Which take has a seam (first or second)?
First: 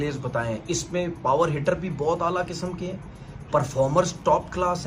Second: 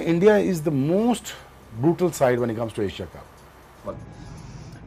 second